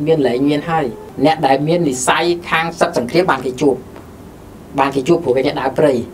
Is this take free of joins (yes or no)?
no